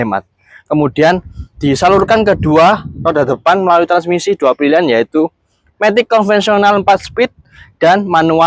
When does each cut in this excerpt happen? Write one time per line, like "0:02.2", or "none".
none